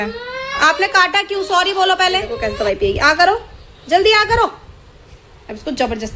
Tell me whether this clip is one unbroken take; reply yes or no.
no